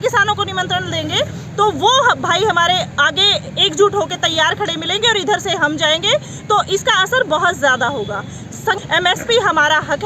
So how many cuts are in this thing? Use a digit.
1